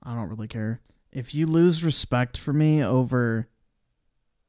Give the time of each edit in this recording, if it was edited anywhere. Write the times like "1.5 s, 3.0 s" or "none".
0.9 s